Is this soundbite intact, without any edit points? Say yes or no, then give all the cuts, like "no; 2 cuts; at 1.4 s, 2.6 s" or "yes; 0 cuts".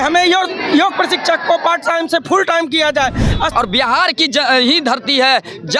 no; 1 cut; at 3.5 s